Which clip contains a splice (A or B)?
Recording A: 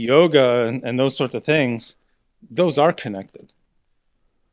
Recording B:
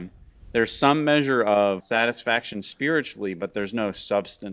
B